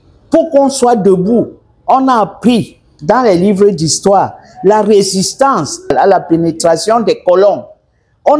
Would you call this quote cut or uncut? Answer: cut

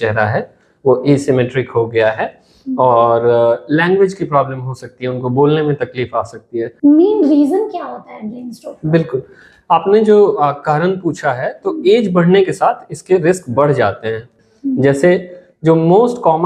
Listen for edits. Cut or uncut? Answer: cut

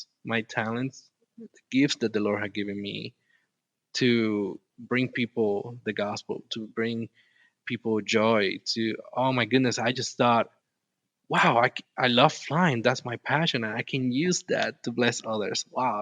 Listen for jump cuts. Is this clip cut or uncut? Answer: uncut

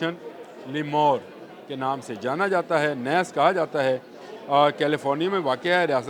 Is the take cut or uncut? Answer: uncut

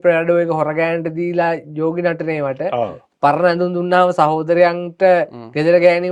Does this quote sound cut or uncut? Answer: uncut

